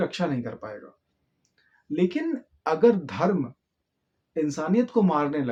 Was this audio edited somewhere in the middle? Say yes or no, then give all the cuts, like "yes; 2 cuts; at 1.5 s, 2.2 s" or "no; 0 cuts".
no; 0 cuts